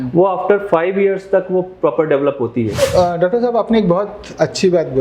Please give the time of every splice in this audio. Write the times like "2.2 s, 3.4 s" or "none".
2.8 s